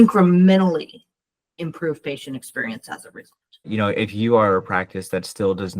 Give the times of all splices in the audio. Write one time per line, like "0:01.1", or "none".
0:03.7

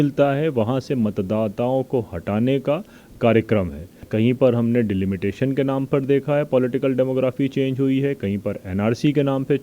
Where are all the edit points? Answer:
0:04.0

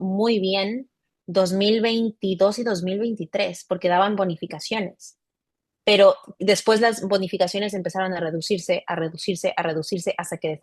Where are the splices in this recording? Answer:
none

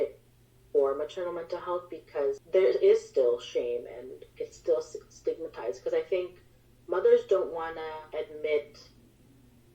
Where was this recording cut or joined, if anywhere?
0:02.4
0:08.0

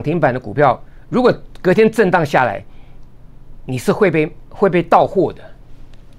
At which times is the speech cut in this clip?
none

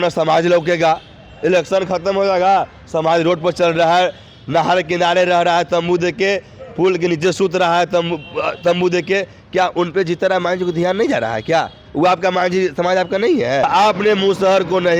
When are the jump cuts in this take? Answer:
0:13.7

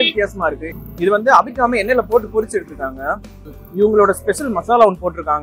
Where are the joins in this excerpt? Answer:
0:03.5

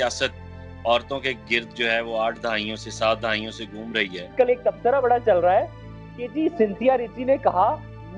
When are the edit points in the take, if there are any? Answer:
0:04.3

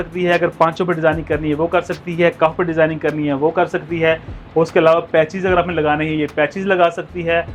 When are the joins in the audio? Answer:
none

